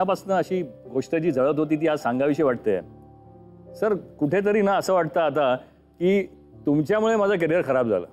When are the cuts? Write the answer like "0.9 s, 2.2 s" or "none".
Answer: none